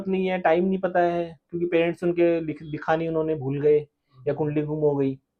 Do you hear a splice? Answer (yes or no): no